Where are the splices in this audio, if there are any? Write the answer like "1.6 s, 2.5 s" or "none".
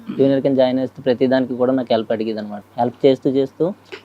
2.5 s